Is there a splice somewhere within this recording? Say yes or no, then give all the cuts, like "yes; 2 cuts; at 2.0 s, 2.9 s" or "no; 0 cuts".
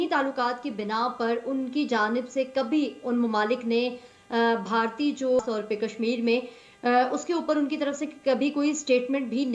no; 0 cuts